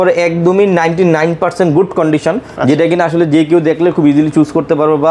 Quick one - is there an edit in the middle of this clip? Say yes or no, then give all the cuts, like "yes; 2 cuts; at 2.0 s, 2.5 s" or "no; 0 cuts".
no; 0 cuts